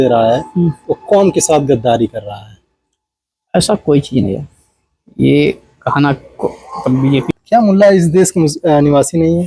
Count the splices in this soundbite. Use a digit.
1